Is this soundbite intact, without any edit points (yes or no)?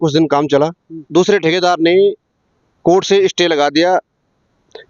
no